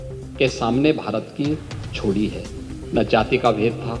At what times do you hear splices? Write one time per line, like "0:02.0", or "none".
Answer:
0:02.7

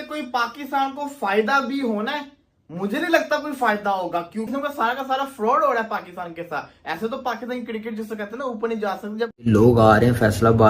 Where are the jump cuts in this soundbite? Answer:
0:04.5
0:09.5

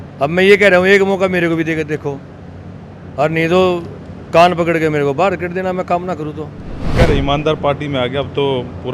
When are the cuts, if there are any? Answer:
0:06.8

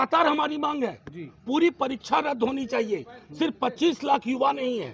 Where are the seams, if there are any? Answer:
none

